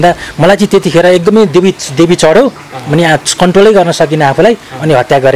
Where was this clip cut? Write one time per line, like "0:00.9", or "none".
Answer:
none